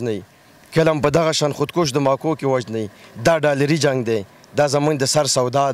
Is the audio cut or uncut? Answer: uncut